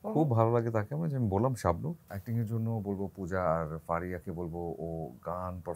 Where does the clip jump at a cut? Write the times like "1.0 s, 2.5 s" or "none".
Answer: 2.1 s